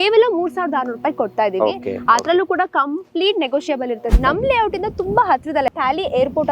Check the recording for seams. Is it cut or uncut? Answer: cut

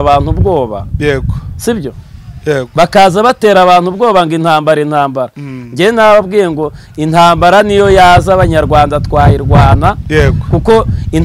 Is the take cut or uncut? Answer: uncut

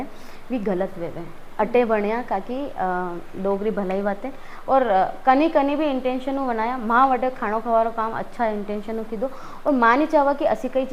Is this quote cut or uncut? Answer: uncut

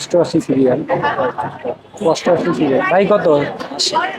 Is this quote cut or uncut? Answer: uncut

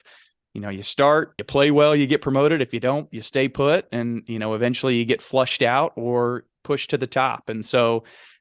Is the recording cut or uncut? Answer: cut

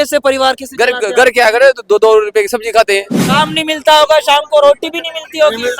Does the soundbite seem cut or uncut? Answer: cut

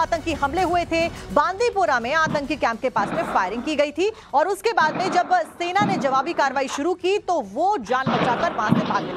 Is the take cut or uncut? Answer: uncut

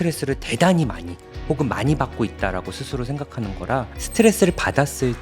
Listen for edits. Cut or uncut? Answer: cut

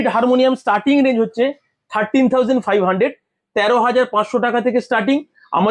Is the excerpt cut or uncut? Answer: uncut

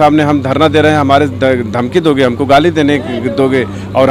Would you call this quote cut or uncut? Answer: uncut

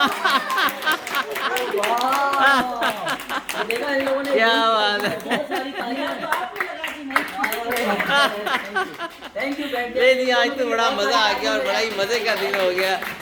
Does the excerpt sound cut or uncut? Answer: uncut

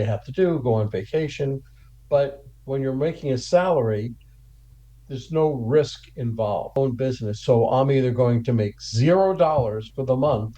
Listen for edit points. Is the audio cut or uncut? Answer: cut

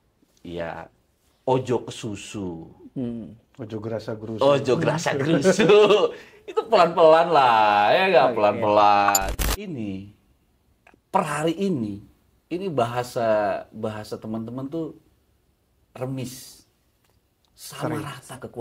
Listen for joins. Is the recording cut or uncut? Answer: cut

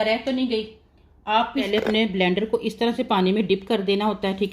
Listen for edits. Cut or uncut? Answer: cut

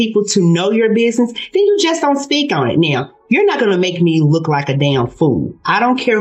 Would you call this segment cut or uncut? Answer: uncut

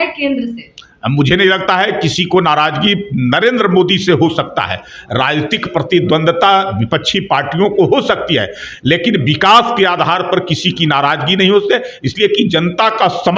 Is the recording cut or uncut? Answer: uncut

